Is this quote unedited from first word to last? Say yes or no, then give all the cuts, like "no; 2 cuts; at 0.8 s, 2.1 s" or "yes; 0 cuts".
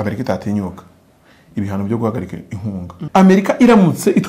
no; 1 cut; at 3.0 s